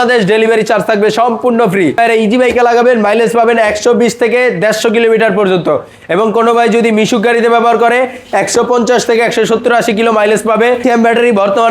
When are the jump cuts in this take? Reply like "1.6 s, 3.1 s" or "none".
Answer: 2.0 s, 10.8 s